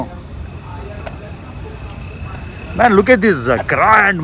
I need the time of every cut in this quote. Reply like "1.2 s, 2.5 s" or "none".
none